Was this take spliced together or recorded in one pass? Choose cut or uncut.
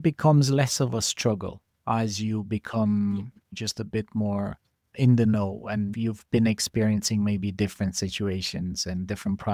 uncut